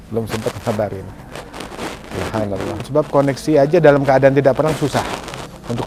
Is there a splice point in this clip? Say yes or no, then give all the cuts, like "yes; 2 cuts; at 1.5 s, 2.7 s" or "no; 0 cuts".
no; 0 cuts